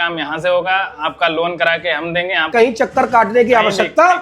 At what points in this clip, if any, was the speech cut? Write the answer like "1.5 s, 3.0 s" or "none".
2.5 s